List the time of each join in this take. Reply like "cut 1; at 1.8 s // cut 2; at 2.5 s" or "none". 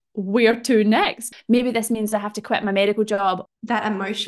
cut 1; at 1.3 s // cut 2; at 3.4 s